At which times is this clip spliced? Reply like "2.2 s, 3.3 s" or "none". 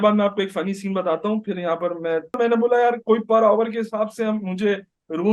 2.4 s